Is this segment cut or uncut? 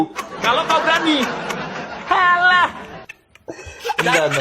uncut